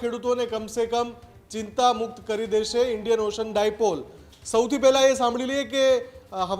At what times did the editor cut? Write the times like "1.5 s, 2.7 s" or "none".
none